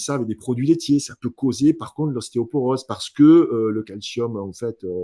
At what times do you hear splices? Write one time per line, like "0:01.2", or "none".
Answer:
none